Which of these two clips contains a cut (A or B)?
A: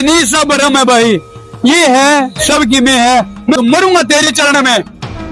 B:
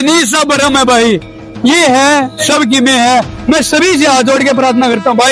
A